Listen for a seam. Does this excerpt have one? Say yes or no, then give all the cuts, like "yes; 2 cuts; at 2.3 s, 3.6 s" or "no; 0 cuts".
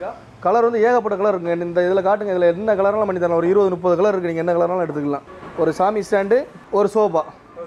yes; 2 cuts; at 5.3 s, 6.6 s